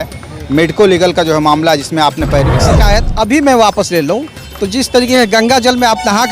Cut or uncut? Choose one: cut